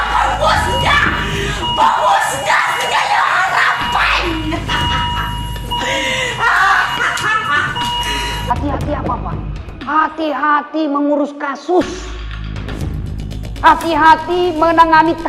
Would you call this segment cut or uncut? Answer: cut